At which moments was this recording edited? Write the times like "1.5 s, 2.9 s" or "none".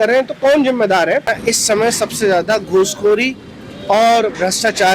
1.4 s

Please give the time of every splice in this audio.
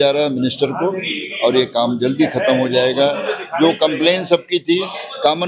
none

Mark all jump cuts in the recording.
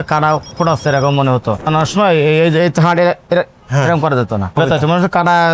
1.6 s

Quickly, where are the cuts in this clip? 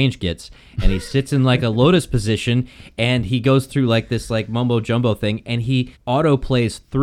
6.0 s

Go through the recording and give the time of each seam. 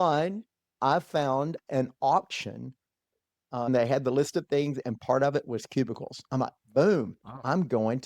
3.7 s

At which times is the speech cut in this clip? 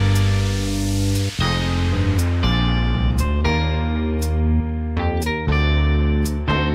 none

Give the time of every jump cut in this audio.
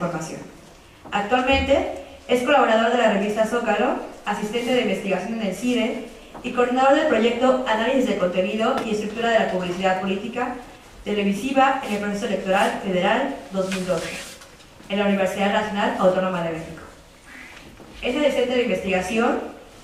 7.4 s

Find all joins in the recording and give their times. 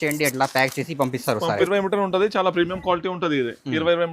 1.6 s

